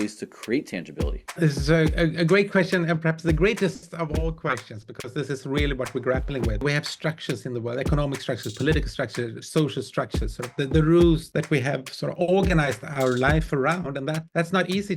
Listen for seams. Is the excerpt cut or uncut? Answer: cut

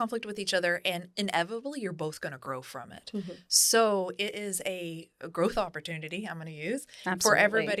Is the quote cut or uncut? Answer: uncut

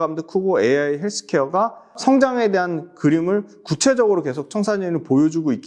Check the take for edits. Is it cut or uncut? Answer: uncut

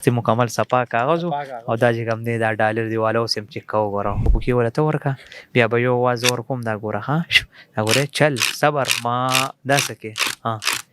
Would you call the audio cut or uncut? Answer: cut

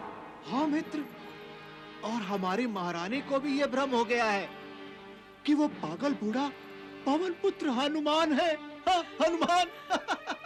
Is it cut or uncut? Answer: uncut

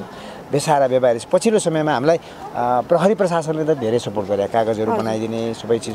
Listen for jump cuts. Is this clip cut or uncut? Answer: uncut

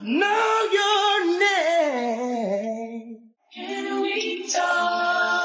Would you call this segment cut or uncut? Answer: uncut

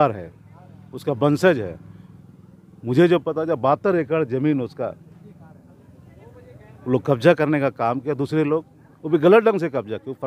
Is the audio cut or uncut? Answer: uncut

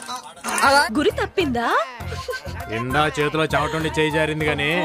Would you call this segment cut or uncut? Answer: cut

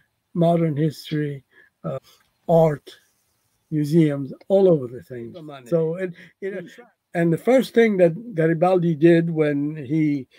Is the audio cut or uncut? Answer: cut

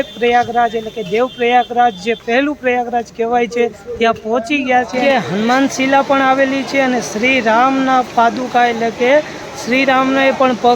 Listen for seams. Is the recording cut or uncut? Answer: cut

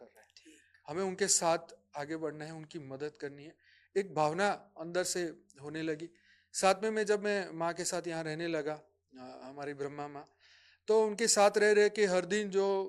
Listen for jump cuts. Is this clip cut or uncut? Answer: uncut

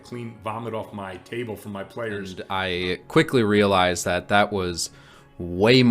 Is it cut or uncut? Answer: cut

